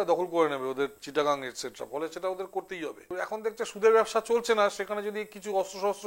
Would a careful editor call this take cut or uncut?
cut